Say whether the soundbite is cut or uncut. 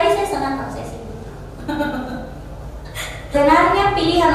cut